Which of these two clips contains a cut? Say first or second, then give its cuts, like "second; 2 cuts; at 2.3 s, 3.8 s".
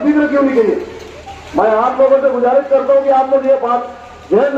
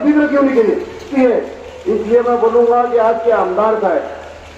second; 1 cut; at 1.1 s